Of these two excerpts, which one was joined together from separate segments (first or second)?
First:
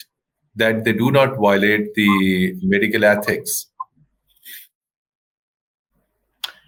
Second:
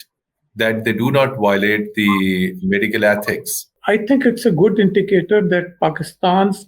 second